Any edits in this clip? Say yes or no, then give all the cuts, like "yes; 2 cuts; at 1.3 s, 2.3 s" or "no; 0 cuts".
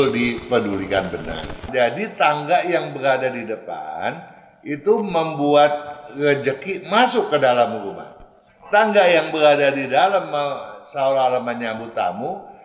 yes; 1 cut; at 1.7 s